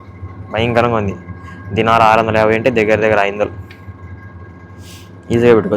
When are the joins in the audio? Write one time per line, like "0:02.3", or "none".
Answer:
none